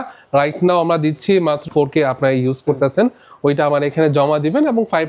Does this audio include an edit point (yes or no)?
yes